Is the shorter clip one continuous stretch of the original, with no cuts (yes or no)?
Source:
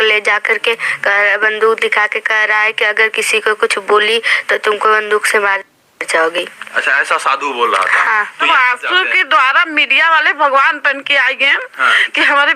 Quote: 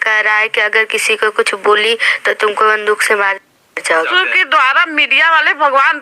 no